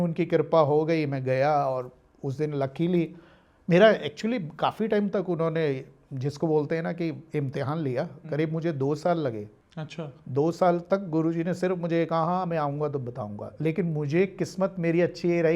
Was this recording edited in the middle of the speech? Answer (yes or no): no